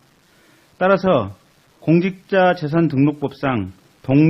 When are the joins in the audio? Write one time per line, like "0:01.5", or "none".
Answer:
0:03.2